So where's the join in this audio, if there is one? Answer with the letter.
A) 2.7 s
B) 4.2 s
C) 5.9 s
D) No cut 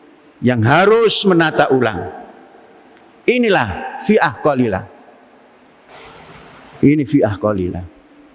C